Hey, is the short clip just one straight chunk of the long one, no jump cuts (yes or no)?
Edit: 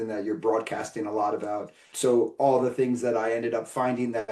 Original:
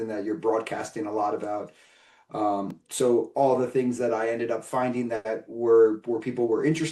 no